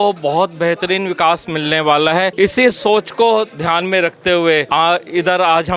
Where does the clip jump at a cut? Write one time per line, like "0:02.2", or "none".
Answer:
0:02.3
0:04.7